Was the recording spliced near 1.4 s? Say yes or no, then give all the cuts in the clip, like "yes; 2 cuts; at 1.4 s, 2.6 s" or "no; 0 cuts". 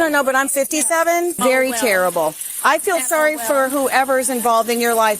yes; 1 cut; at 1.4 s